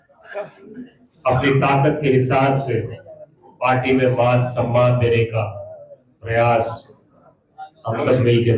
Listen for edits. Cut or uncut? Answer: uncut